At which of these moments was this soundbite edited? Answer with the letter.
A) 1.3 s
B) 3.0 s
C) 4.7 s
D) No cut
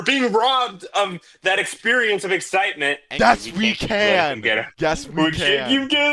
B